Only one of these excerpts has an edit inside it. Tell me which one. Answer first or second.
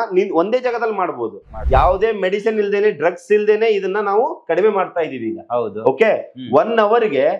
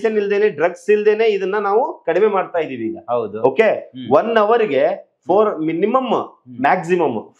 first